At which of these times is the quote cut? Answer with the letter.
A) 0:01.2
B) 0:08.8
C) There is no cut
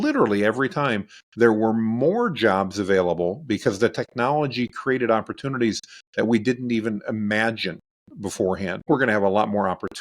B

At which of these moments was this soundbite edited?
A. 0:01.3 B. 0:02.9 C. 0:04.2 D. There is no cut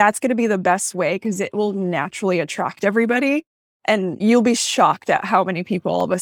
C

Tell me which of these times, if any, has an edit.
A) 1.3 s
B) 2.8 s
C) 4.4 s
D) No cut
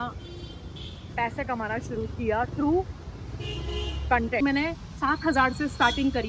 C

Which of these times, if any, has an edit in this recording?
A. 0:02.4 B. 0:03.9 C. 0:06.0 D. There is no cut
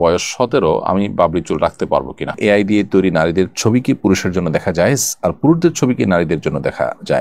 A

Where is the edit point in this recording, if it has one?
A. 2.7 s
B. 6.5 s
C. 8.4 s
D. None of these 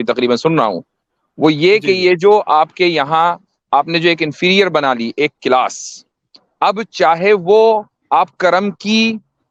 D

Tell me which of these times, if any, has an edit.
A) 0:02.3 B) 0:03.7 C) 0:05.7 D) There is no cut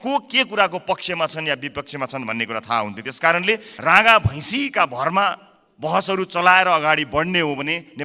B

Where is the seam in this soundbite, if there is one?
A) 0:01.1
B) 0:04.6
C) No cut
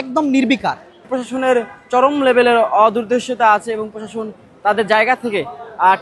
A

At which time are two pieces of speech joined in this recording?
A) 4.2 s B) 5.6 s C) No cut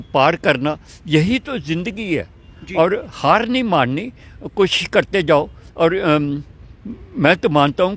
C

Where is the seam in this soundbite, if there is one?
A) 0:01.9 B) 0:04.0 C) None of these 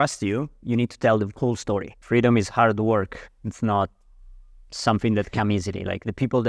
A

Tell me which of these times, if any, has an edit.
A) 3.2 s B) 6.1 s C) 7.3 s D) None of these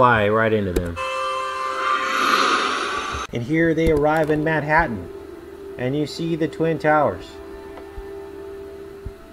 A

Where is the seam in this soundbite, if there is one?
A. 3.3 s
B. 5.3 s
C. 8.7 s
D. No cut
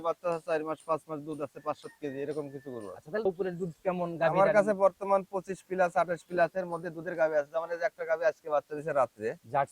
A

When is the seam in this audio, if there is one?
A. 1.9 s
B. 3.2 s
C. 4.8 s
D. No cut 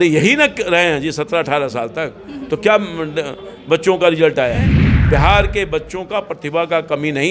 C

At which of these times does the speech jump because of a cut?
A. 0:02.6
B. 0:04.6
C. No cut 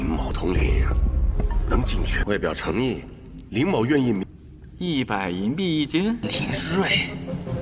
C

